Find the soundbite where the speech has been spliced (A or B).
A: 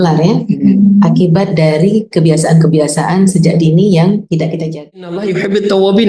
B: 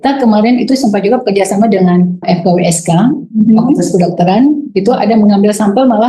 A